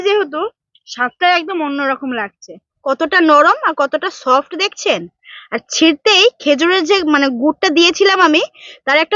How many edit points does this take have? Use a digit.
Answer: 1